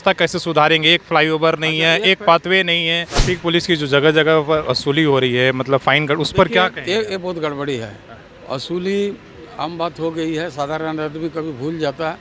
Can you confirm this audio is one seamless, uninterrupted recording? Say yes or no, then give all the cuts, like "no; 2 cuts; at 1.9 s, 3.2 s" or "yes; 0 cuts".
no; 1 cut; at 3.1 s